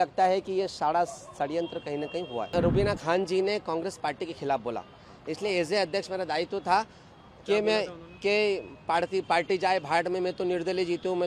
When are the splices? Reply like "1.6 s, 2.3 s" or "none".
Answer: 2.5 s